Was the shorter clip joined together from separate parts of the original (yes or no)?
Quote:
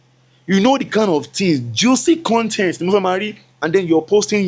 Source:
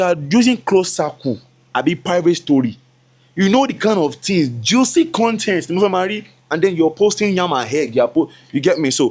no